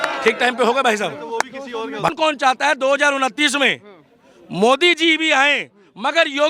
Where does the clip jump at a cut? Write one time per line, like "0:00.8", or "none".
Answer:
0:02.1